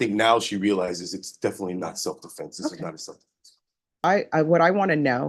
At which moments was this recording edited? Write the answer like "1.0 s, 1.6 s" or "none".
4.0 s